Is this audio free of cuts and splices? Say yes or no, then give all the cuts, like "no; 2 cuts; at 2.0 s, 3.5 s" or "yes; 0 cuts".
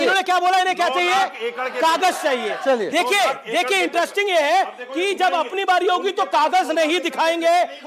yes; 0 cuts